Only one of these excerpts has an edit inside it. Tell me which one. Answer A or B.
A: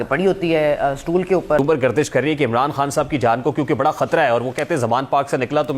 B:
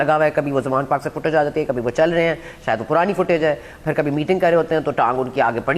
A